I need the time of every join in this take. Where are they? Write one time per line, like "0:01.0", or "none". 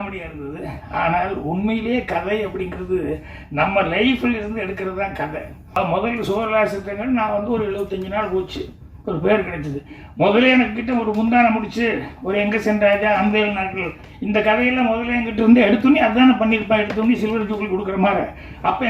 0:05.8